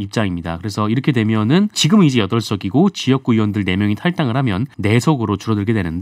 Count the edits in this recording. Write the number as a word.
two